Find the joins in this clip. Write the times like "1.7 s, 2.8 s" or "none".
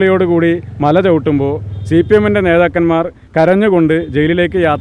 none